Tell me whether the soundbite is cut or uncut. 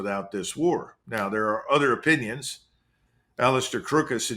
uncut